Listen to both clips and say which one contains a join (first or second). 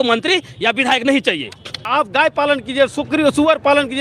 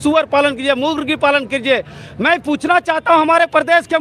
first